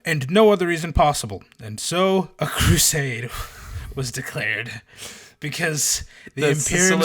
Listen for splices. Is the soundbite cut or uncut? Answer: uncut